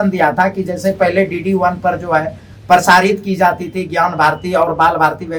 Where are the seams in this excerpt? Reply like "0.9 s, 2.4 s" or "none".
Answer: none

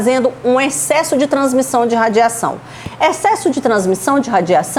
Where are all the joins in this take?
none

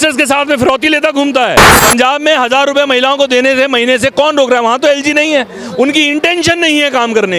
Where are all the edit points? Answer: 1.7 s

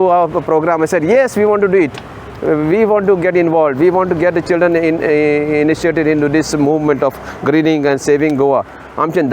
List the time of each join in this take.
none

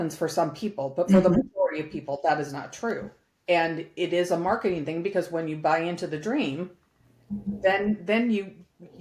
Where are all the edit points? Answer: none

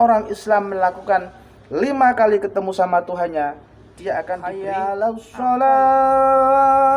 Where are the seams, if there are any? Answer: 4.4 s

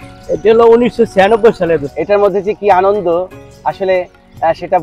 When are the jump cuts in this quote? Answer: 1.9 s

